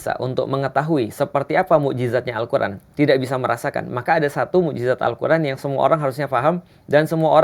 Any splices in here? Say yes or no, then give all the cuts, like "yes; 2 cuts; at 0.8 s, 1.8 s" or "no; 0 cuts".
no; 0 cuts